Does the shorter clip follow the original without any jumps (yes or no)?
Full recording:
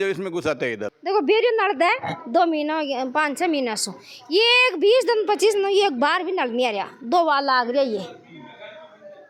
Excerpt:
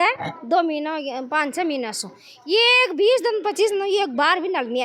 yes